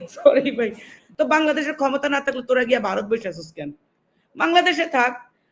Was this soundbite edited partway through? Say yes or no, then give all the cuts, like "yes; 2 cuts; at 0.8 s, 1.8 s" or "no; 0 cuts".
yes; 1 cut; at 1.0 s